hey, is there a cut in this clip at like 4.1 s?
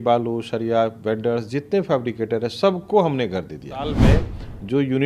yes; 1 cut; at 4.1 s

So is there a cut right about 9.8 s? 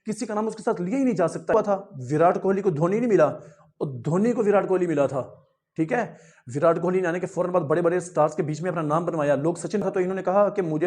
yes; 2 cuts; at 1.5 s, 9.8 s

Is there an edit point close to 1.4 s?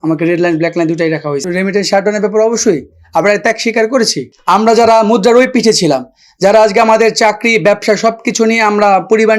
yes; 2 cuts; at 1.4 s, 4.3 s

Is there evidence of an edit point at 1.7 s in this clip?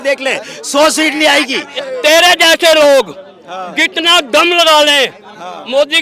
yes; 1 cut; at 1.7 s

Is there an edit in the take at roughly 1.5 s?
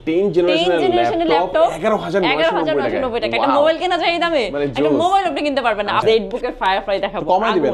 no; 1 cut; at 6.0 s

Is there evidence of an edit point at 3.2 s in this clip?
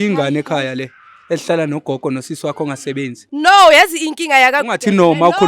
yes; 1 cut; at 3.2 s

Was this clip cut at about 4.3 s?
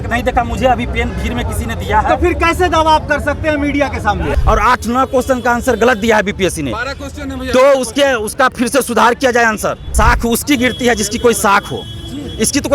yes; 2 cuts; at 4.3 s, 9.9 s

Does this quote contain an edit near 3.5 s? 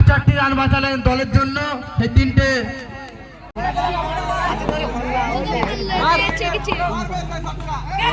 yes; 1 cut; at 3.5 s

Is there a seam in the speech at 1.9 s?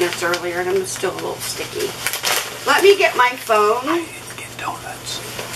no; 0 cuts

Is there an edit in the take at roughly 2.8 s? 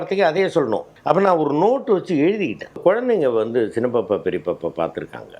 yes; 2 cuts; at 0.9 s, 2.8 s

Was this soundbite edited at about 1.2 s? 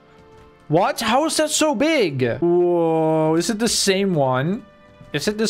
no; 1 cut; at 2.4 s

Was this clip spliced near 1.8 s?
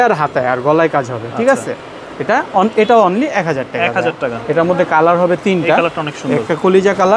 no; 0 cuts

